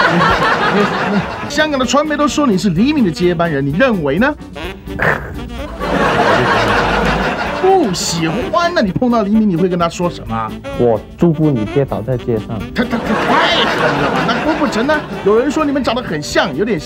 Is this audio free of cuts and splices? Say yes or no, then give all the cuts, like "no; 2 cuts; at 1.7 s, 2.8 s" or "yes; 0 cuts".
no; 1 cut; at 1.5 s